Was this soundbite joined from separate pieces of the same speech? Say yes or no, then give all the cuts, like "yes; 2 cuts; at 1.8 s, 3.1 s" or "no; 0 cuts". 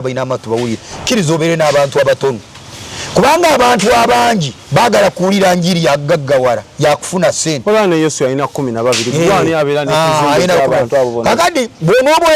no; 0 cuts